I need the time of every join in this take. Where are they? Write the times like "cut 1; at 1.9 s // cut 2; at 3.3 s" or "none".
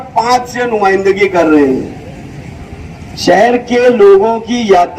none